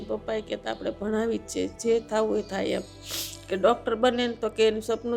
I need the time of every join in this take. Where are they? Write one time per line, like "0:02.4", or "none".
none